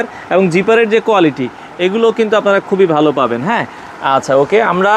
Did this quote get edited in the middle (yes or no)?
no